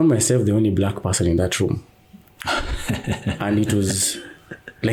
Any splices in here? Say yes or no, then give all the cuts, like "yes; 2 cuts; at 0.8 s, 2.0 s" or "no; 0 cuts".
no; 0 cuts